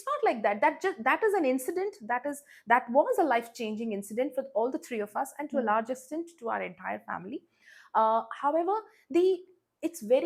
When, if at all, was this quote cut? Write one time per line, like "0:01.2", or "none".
none

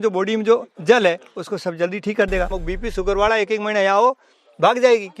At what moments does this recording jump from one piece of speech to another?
0:02.5

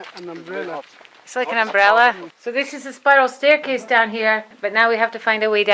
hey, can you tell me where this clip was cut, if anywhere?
0:02.3
0:04.6

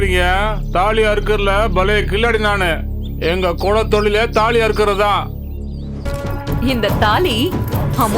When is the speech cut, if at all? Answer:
0:06.1

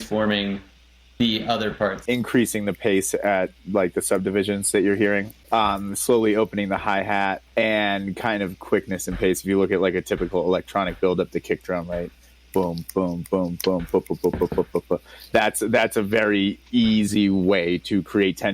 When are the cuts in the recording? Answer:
0:02.0
0:05.4
0:07.4

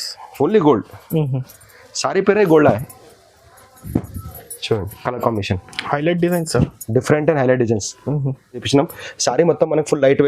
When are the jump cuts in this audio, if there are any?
0:03.8
0:08.6

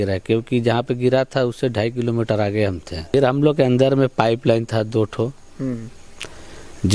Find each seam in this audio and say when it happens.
0:03.1

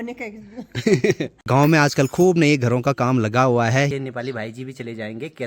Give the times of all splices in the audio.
0:01.3
0:03.9

